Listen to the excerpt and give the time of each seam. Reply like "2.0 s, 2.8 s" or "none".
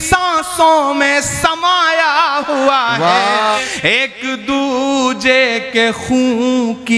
3.6 s